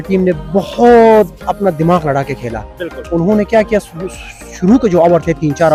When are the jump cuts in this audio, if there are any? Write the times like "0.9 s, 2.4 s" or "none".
none